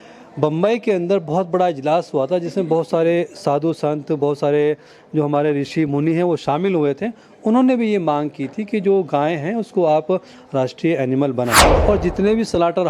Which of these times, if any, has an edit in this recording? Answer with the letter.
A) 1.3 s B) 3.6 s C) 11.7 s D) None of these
C